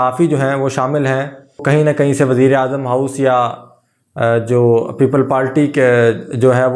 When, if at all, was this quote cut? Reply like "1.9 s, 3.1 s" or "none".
1.6 s